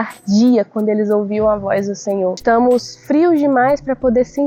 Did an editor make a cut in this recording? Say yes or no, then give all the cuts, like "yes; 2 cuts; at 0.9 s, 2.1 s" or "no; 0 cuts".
yes; 1 cut; at 2.4 s